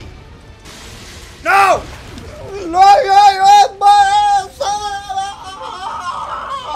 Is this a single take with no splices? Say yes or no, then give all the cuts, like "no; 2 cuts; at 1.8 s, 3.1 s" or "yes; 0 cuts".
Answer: yes; 0 cuts